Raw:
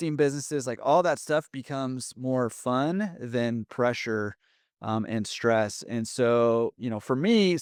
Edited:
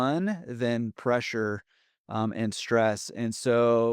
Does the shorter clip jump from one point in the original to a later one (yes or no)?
no